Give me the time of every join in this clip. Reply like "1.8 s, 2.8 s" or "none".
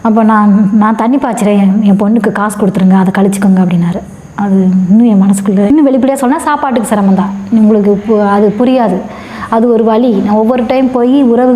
5.7 s